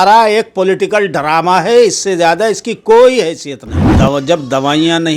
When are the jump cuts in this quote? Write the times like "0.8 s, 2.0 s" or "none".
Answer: 3.8 s